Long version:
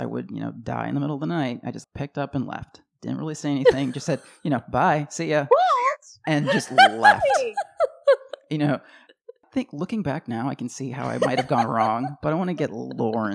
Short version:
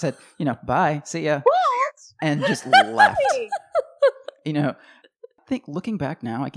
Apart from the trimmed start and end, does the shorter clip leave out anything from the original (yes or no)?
no